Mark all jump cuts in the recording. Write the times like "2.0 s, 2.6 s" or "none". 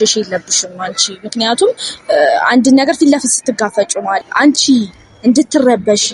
4.3 s